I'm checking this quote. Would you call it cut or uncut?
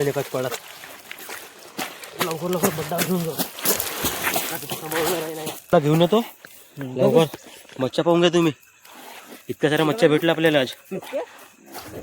cut